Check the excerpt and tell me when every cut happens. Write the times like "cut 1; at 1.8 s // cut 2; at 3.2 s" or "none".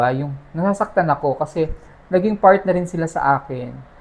none